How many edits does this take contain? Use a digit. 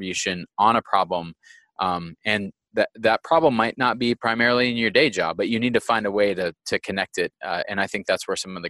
0